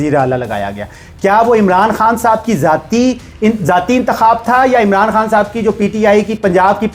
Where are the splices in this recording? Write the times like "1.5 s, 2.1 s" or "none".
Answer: none